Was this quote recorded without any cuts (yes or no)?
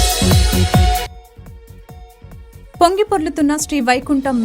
no